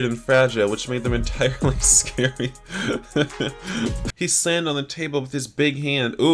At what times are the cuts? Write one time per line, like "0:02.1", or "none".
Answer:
0:04.1